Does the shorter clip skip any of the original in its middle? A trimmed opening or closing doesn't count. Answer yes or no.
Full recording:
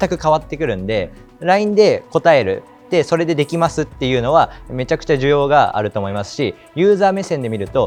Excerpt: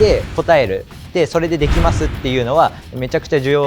no